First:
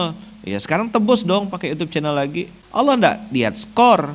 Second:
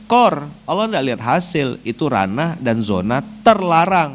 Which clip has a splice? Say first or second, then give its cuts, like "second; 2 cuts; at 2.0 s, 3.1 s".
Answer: first; 1 cut; at 2.5 s